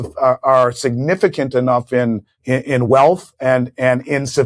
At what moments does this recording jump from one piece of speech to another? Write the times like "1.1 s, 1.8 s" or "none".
2.3 s